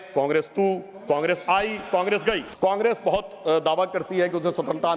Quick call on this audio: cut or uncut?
cut